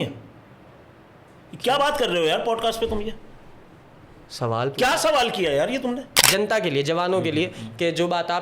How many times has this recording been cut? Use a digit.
1